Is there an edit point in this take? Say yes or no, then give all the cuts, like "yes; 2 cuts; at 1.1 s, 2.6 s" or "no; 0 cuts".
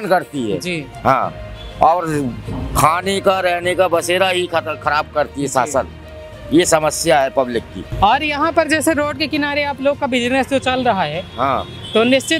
no; 0 cuts